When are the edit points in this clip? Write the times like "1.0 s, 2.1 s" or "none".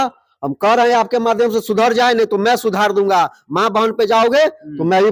none